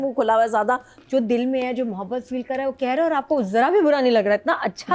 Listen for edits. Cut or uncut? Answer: cut